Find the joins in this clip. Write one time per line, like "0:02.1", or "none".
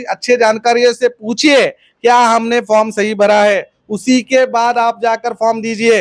none